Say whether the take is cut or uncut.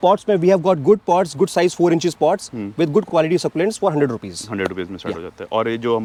uncut